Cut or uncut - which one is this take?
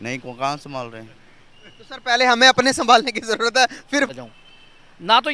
cut